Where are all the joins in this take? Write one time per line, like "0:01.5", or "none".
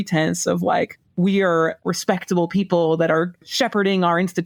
none